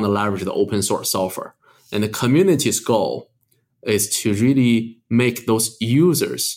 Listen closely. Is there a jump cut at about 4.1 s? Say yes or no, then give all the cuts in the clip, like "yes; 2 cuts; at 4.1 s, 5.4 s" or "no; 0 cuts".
yes; 1 cut; at 4.1 s